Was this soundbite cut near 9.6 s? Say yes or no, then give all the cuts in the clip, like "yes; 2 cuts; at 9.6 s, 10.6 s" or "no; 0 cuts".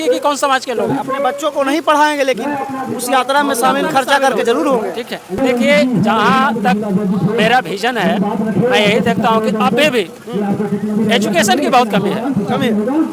no; 1 cut; at 5.4 s